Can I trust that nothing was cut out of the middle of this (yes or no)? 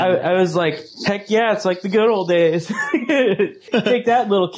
no